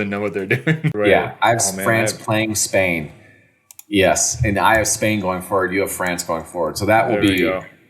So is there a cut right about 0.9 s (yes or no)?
yes